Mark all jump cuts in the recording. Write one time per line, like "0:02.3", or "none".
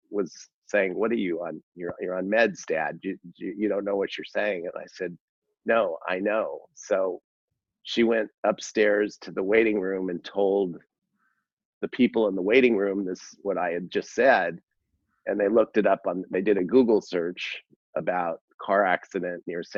none

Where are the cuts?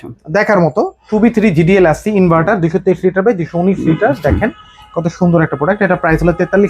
0:01.0

